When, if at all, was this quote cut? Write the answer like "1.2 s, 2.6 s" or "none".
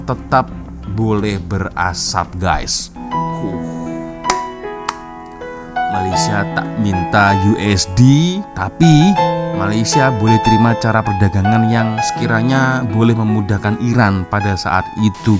none